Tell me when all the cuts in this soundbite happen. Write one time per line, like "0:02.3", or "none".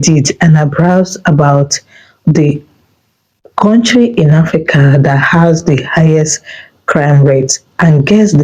none

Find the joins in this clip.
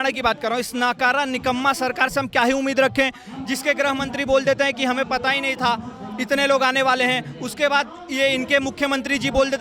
none

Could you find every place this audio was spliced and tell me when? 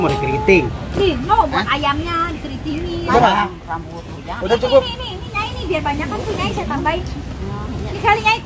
none

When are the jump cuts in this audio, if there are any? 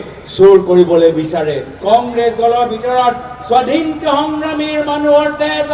0:01.7

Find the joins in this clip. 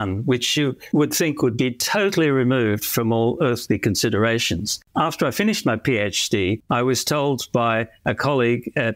0:04.8
0:06.6

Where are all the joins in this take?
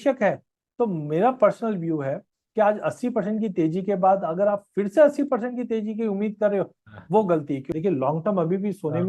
0:07.7

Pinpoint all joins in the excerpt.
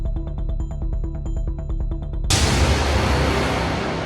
0:02.0

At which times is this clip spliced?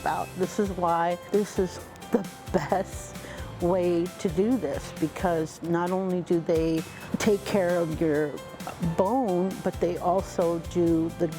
0:01.2

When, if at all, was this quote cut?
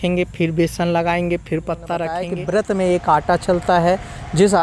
0:02.3

